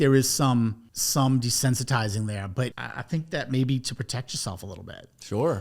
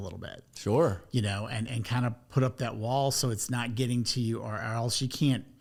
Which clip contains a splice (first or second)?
first